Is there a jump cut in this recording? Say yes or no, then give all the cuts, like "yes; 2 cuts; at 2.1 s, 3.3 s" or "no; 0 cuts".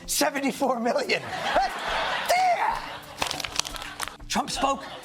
yes; 1 cut; at 4.0 s